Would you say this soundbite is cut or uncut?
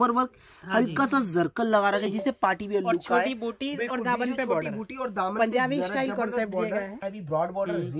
cut